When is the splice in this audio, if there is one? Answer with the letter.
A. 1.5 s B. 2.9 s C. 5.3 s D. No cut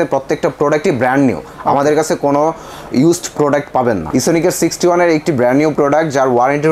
D